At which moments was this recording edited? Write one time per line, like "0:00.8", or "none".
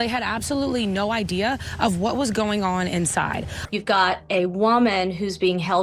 0:03.5